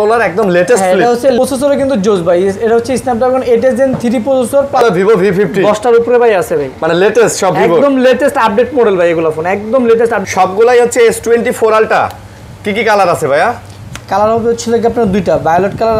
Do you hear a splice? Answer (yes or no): yes